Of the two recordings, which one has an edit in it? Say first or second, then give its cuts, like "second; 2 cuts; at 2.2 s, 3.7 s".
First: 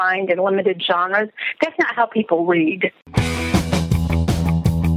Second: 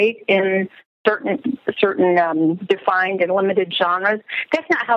first; 1 cut; at 3.0 s